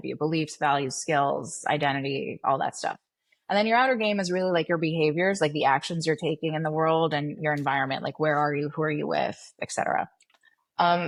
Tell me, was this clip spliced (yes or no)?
no